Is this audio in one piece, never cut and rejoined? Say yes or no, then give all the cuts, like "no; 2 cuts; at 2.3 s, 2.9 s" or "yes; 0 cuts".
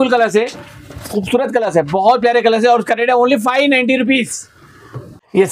yes; 0 cuts